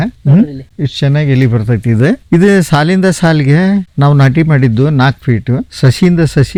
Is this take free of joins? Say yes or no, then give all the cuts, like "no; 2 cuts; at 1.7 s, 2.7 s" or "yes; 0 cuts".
yes; 0 cuts